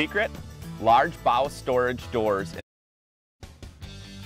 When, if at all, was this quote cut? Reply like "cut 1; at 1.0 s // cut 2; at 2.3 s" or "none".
none